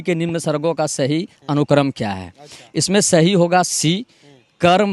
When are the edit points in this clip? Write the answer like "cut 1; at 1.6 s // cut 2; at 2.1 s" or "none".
none